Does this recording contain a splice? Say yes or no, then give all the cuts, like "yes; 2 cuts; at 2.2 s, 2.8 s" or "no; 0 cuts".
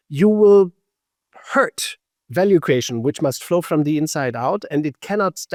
no; 0 cuts